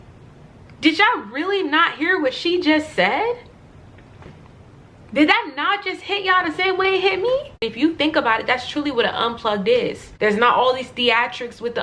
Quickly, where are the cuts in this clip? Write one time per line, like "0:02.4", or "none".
0:07.6
0:10.0